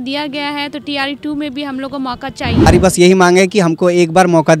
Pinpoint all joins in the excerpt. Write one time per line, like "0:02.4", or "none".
0:02.7